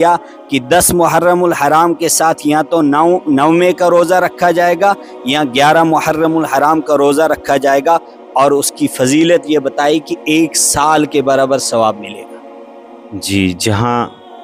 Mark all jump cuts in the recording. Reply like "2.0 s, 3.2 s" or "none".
none